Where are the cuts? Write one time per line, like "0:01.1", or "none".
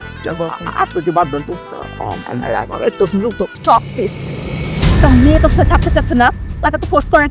0:03.5